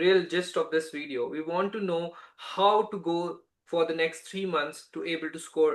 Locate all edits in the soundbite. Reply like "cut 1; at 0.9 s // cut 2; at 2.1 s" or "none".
none